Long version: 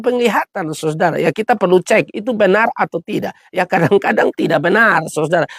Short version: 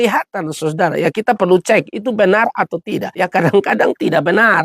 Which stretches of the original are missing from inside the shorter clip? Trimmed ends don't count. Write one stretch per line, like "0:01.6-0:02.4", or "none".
0:03.3-0:03.5